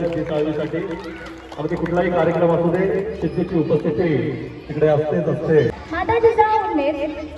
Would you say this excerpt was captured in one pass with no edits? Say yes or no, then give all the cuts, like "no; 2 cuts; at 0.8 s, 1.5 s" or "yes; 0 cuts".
no; 1 cut; at 5.7 s